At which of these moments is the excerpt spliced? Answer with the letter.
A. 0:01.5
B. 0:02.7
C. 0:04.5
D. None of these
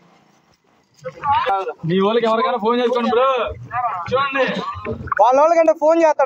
A